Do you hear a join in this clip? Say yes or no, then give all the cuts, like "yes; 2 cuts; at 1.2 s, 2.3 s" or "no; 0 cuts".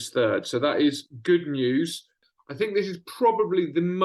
yes; 1 cut; at 2.3 s